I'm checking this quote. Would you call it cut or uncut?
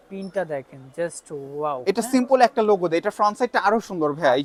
uncut